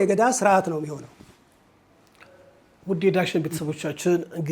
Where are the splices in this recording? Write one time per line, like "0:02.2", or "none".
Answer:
none